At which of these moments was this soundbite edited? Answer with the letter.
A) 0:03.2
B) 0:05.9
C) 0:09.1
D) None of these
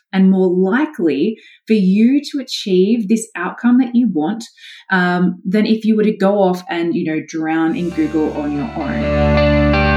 C